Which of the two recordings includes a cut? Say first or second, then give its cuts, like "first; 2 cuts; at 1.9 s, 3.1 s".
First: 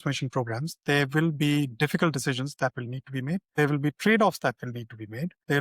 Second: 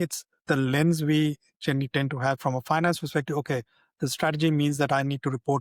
first; 1 cut; at 3.5 s